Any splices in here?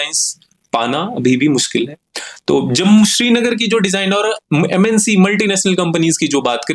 no; 0 cuts

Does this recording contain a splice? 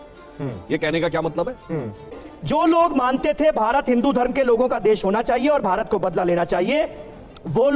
no; 0 cuts

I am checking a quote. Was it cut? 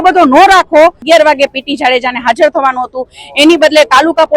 yes; 1 cut; at 1.0 s

